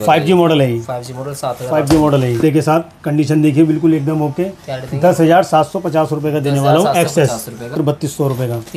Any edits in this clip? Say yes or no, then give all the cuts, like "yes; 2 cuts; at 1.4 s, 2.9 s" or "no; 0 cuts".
yes; 2 cuts; at 2.4 s, 7.7 s